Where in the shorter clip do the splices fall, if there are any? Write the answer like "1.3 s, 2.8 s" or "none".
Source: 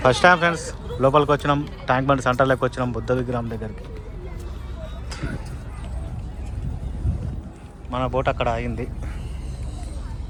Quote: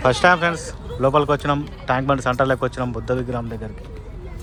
none